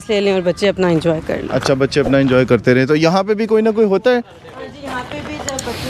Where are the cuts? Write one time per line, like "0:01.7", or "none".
none

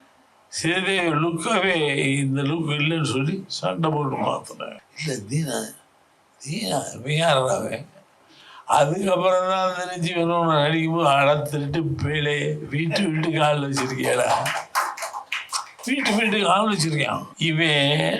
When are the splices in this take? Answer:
0:04.9
0:17.3

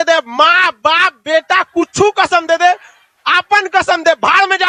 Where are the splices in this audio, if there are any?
none

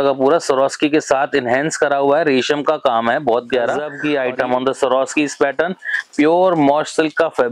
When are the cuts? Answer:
0:03.9

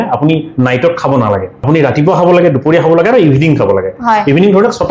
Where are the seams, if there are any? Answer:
0:01.5

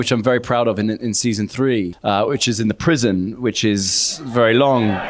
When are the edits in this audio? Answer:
0:01.9

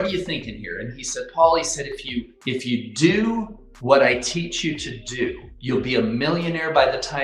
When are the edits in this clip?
none

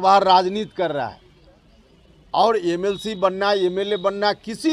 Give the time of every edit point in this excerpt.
none

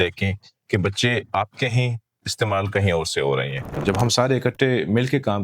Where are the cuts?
0:03.8

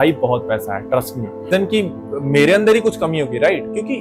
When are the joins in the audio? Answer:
0:01.5

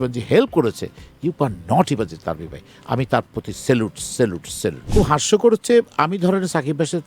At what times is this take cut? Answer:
0:04.9

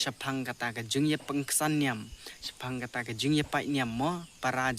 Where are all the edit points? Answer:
none

